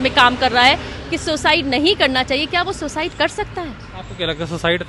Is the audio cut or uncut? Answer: uncut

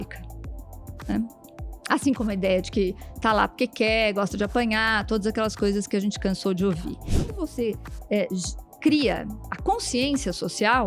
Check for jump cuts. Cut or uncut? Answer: cut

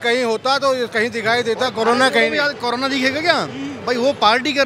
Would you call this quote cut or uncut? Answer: uncut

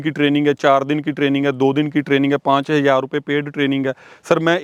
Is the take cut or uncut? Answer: uncut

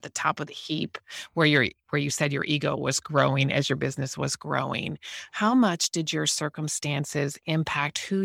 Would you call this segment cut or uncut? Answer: uncut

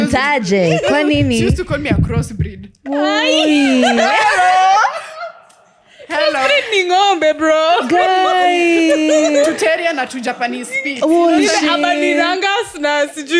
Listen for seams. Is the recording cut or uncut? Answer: uncut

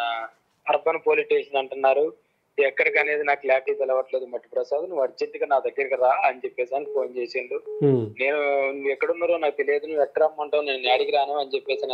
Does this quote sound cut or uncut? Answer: uncut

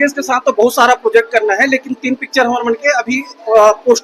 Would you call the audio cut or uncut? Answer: uncut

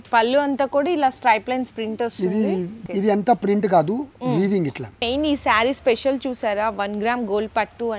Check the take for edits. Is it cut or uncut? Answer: cut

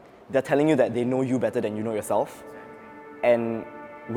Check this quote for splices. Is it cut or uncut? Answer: uncut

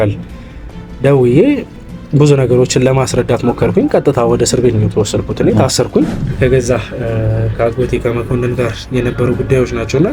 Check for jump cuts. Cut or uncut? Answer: cut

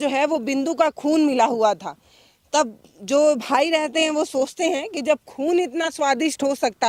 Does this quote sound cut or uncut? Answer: uncut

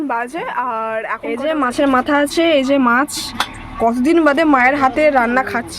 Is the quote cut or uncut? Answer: cut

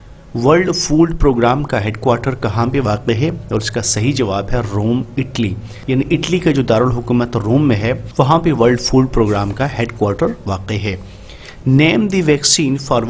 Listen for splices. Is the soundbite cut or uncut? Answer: cut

